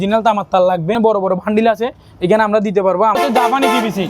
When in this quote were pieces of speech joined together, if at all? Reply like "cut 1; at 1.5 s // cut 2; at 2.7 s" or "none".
cut 1; at 1.0 s // cut 2; at 3.2 s